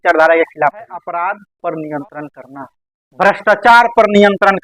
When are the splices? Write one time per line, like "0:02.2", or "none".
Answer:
0:01.0